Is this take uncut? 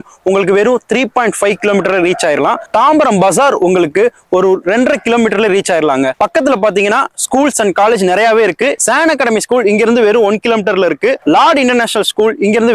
yes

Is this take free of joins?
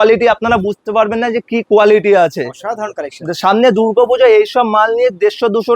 yes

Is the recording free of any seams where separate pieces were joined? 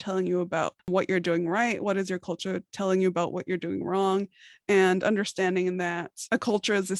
no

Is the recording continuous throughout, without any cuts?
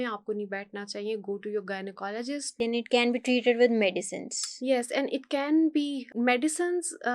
no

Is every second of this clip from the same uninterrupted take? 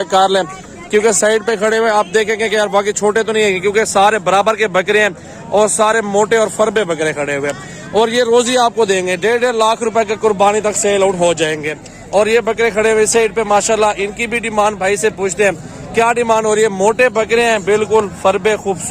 yes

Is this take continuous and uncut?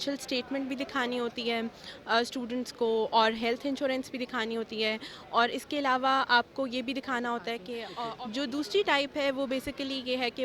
no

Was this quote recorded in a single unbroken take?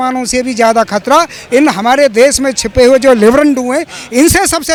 yes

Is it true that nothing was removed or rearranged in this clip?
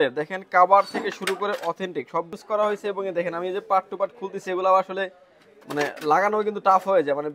no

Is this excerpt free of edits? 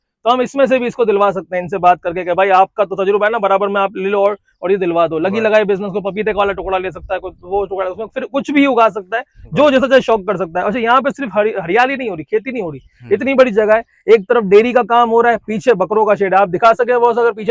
yes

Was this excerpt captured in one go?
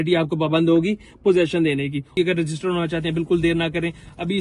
no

